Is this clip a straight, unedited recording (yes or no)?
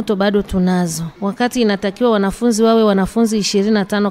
no